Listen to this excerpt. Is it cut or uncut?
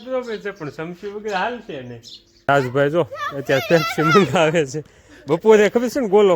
cut